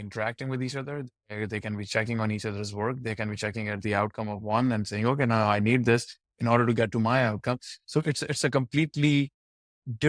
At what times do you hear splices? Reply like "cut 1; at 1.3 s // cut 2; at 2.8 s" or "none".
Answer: none